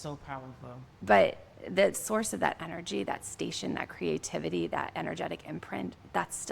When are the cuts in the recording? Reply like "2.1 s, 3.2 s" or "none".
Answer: 2.0 s